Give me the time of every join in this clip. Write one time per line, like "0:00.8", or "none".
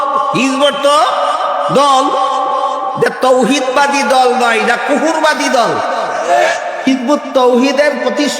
0:06.9